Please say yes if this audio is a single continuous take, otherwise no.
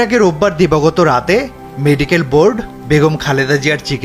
yes